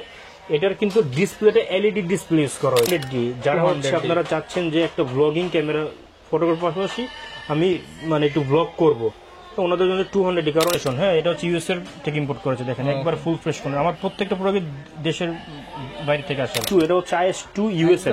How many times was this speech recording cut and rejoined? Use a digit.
3